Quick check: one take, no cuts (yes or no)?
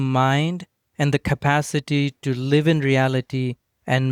yes